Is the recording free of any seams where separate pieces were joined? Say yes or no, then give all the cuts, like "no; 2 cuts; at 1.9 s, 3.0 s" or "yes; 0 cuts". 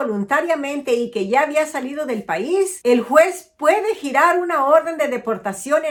yes; 0 cuts